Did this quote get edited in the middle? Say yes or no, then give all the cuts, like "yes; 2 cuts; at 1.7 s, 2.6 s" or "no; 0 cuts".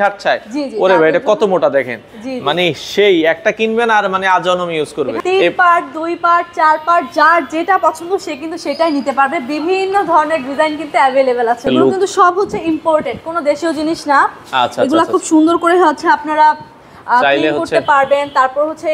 yes; 2 cuts; at 5.2 s, 11.6 s